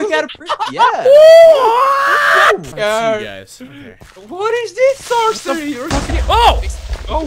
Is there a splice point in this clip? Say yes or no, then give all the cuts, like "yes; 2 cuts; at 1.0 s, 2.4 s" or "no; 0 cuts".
yes; 1 cut; at 2.7 s